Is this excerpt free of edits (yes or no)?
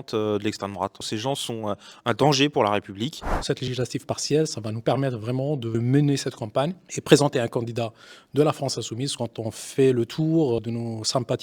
no